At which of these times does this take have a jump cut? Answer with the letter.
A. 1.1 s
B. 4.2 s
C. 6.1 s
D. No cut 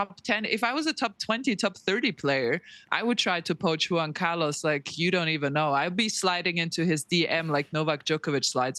D